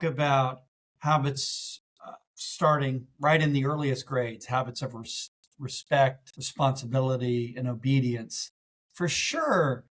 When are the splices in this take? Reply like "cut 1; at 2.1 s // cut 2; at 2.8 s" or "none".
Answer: none